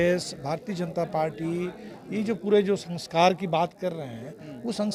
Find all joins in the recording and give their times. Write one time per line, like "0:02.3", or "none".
none